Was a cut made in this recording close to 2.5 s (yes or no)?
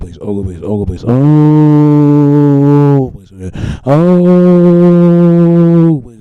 no